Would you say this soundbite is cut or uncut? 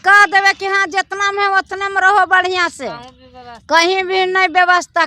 uncut